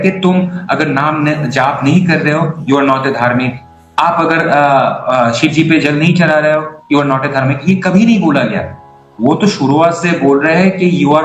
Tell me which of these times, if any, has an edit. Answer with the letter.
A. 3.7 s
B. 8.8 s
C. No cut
C